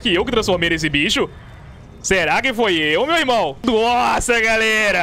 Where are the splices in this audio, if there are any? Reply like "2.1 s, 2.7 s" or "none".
3.6 s